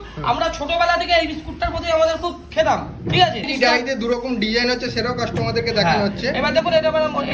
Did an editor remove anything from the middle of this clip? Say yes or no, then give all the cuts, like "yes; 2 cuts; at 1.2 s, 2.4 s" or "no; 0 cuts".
yes; 1 cut; at 3.5 s